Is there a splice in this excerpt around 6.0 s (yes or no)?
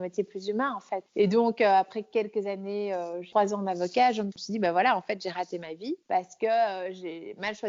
yes